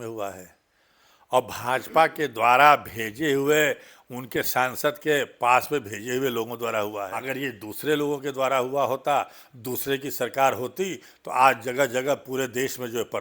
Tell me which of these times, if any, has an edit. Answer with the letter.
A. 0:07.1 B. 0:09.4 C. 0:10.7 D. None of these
A